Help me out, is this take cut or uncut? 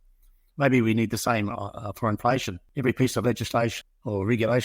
cut